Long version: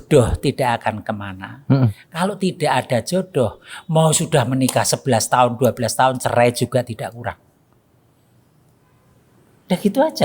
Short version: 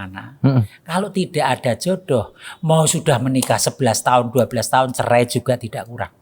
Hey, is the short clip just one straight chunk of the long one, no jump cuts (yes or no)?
yes